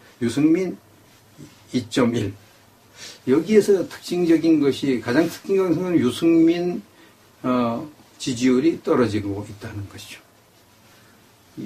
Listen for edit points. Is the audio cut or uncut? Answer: cut